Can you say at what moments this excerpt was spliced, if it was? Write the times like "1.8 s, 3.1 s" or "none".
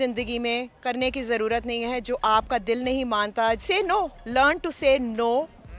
3.6 s